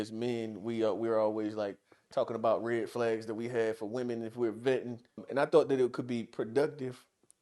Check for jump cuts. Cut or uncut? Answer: cut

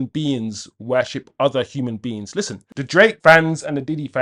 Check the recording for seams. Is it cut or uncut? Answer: cut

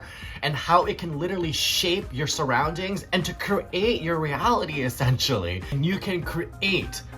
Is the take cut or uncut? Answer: cut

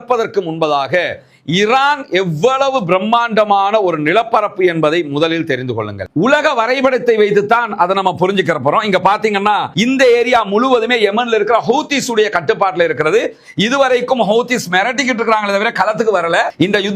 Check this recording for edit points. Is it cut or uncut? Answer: cut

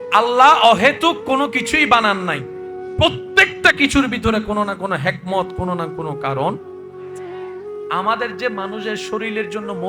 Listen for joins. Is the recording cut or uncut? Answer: uncut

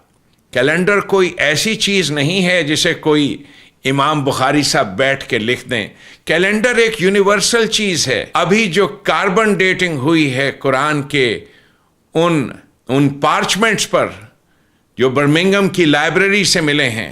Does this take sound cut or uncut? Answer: cut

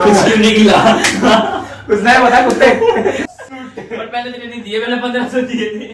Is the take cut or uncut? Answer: cut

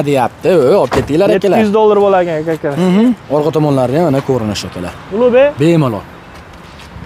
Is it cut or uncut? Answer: uncut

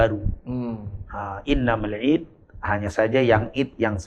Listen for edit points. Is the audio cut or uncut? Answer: uncut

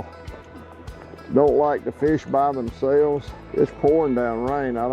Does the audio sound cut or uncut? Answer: cut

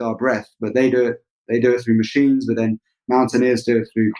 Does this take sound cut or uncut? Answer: cut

